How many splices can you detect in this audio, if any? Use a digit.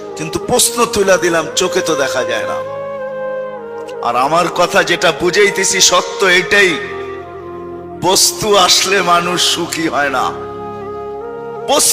0